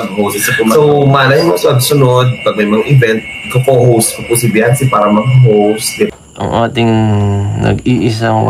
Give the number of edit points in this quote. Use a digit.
1